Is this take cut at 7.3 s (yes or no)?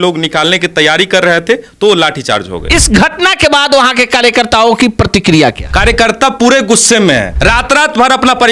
yes